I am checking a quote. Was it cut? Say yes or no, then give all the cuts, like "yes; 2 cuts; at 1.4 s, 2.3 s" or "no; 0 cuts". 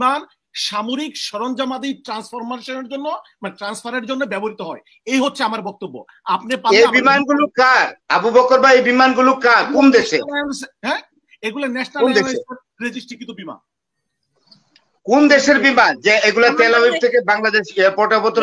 no; 0 cuts